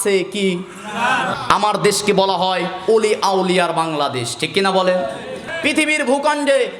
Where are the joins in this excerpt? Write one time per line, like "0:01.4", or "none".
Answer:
0:01.3
0:05.4